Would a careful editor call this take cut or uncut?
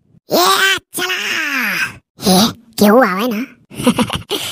uncut